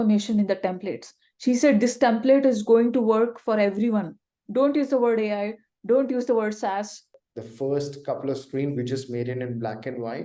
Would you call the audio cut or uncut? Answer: cut